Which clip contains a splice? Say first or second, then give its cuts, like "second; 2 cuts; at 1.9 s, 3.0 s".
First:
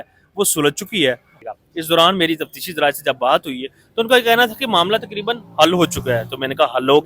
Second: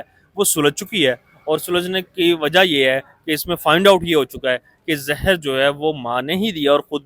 first; 1 cut; at 1.4 s